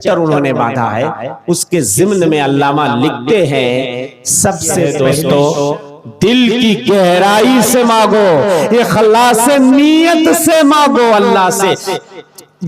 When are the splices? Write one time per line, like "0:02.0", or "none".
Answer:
0:04.9